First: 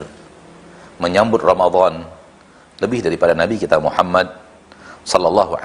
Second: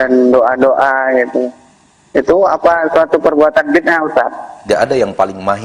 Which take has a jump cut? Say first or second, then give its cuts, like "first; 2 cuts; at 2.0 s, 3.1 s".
second; 1 cut; at 4.6 s